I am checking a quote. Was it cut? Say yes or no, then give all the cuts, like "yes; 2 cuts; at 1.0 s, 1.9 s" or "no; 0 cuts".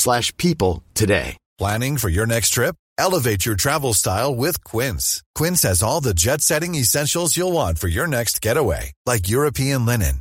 yes; 1 cut; at 1.4 s